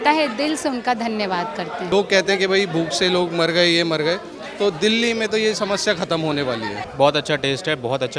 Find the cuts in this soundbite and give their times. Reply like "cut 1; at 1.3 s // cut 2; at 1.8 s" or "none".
cut 1; at 1.9 s // cut 2; at 6.8 s